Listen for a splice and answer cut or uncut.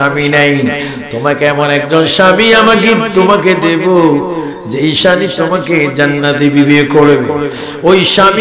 uncut